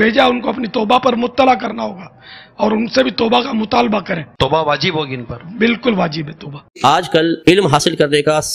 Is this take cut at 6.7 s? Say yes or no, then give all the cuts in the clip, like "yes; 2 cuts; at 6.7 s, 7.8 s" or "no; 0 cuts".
yes; 1 cut; at 6.7 s